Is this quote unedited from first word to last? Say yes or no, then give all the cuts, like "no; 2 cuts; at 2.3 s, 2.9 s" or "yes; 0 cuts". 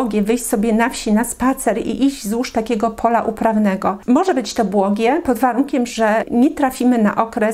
no; 1 cut; at 6.2 s